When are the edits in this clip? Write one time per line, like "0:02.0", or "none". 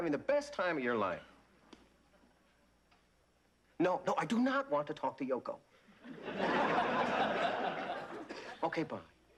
0:03.4